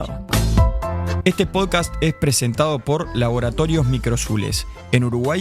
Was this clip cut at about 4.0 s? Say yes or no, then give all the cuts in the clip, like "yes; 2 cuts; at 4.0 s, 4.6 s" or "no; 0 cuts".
no; 1 cut; at 1.2 s